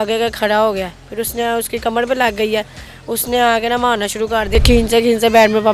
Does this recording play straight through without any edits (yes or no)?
no